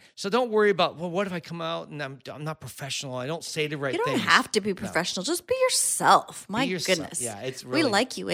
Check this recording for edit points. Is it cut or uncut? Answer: uncut